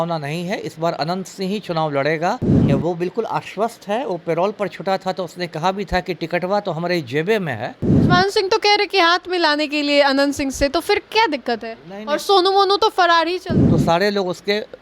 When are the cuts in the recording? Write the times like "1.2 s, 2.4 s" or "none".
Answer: 2.5 s, 7.9 s, 13.5 s